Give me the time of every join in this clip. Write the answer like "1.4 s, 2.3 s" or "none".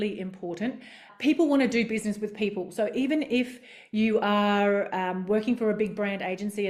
none